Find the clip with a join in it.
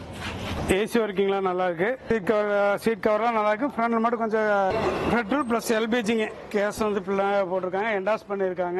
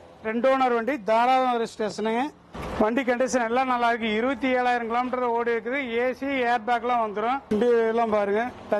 first; 1 cut; at 4.7 s

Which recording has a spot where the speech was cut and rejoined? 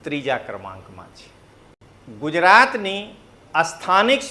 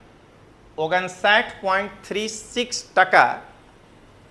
first; 1 cut; at 1.8 s

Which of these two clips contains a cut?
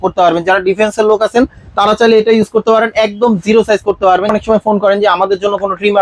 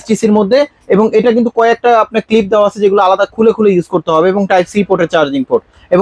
first; 1 cut; at 4.3 s

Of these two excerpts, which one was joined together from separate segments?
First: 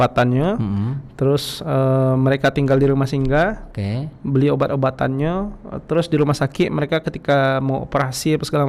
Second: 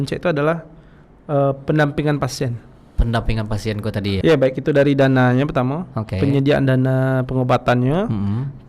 second; 1 cut; at 4.2 s

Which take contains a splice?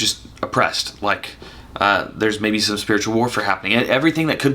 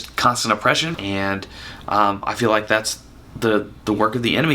second; 1 cut; at 0.9 s

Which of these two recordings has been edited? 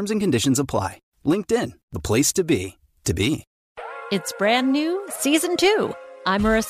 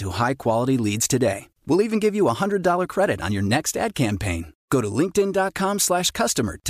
first; 1 cut; at 3.6 s

